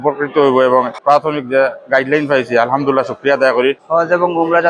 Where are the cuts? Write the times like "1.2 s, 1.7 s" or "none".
0.9 s, 3.8 s